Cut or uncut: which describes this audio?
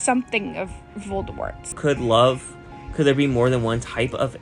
cut